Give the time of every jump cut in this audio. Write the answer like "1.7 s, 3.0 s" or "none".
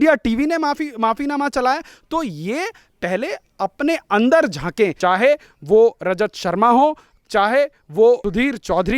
5.0 s